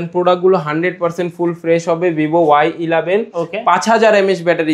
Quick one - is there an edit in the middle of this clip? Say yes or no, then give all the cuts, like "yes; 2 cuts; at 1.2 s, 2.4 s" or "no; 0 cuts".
no; 0 cuts